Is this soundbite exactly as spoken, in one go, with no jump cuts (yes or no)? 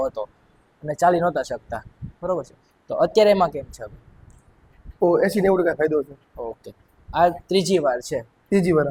yes